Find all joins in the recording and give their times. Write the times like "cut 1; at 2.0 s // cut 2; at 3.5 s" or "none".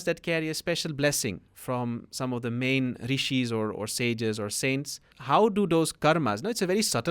cut 1; at 5.1 s